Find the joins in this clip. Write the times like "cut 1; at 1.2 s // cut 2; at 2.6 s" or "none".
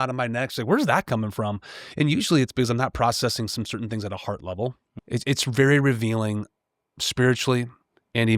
cut 1; at 4.9 s